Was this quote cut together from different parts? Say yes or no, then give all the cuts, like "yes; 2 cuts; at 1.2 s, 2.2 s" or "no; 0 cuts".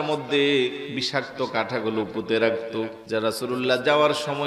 yes; 2 cuts; at 0.9 s, 3.0 s